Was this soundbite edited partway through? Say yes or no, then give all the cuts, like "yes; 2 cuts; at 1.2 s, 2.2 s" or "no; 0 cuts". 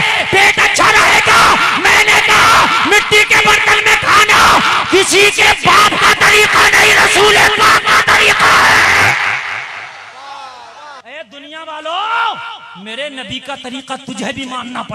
yes; 1 cut; at 11.0 s